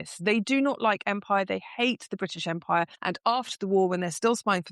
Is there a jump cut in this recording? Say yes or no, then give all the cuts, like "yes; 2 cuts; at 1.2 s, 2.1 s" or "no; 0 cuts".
yes; 1 cut; at 3.0 s